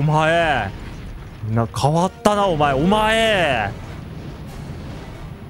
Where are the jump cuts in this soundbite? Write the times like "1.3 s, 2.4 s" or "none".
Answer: none